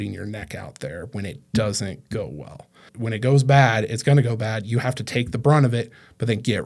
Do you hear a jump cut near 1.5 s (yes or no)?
no